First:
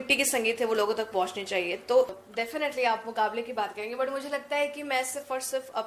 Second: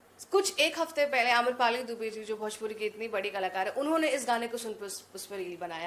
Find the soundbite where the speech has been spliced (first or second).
first